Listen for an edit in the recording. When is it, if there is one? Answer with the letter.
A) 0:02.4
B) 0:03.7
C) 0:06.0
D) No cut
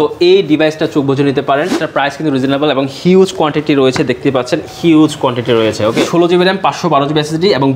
C